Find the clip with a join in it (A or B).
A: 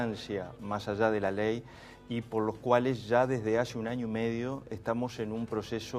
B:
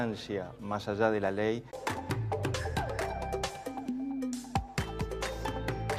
A